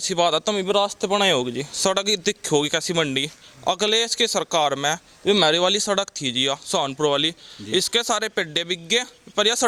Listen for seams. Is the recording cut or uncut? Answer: uncut